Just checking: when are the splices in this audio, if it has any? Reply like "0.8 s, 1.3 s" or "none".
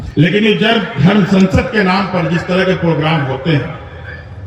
none